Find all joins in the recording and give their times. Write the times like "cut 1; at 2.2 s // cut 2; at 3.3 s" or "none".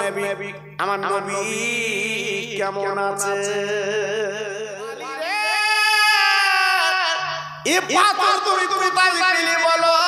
cut 1; at 4.9 s